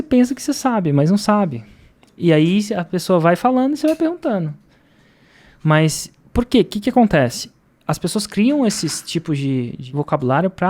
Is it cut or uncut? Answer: cut